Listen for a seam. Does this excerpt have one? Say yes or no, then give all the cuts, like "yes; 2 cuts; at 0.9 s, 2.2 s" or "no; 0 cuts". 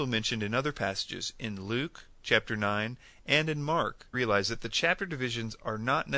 no; 0 cuts